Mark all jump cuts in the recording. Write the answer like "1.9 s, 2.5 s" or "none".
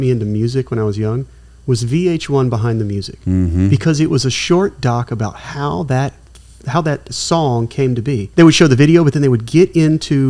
8.2 s